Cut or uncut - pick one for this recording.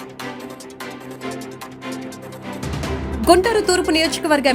cut